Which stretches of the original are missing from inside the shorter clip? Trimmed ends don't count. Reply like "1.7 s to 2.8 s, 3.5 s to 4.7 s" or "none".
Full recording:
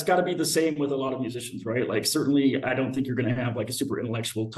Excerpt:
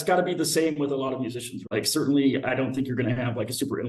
1.7 s to 1.9 s